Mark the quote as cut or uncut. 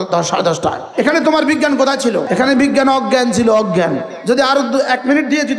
cut